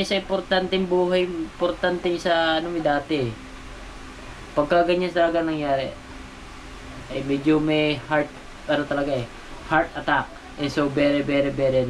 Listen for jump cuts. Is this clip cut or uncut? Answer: uncut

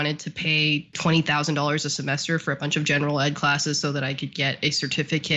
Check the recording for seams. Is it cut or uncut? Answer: cut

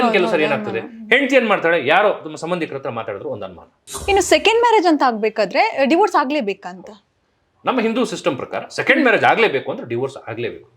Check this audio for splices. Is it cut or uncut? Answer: cut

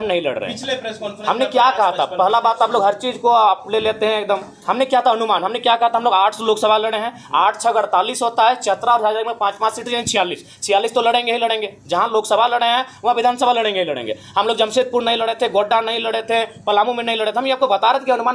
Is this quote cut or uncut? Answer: uncut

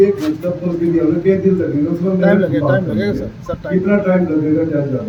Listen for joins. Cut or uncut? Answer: uncut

